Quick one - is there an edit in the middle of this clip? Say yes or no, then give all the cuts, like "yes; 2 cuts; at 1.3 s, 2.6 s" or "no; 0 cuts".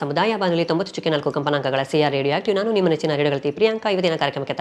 no; 0 cuts